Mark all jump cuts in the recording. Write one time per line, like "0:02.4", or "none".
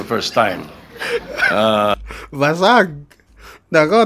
none